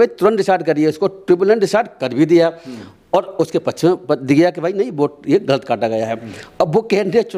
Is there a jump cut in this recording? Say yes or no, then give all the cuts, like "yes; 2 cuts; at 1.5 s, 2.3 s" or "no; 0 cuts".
no; 0 cuts